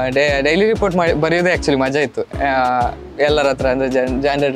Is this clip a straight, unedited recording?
yes; 0 cuts

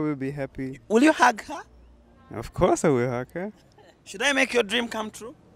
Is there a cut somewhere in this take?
no; 0 cuts

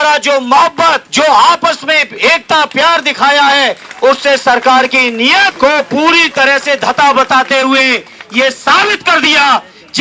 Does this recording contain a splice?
yes; 2 cuts; at 1.1 s, 5.5 s

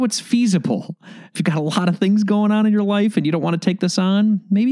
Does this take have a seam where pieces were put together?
yes; 1 cut; at 1.3 s

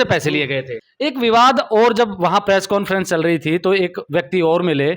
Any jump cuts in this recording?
yes; 1 cut; at 1.0 s

